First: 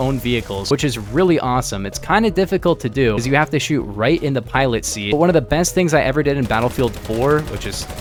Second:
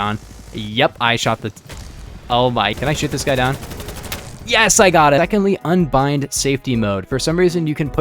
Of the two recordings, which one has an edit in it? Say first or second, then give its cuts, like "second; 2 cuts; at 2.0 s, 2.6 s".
second; 2 cuts; at 2.8 s, 5.2 s